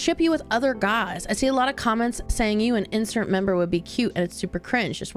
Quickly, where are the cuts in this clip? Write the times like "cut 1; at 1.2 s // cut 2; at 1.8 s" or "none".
none